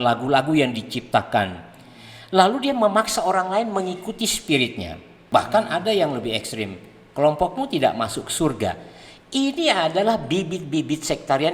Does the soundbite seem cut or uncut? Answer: cut